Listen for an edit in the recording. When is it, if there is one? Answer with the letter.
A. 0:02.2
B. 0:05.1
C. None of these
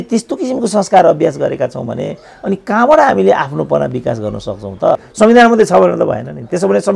B